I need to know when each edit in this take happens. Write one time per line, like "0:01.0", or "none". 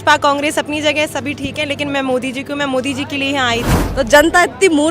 0:03.8